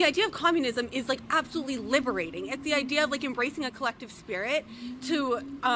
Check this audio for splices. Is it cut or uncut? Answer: uncut